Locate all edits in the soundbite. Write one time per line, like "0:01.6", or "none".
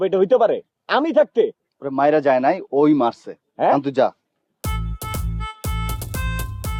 none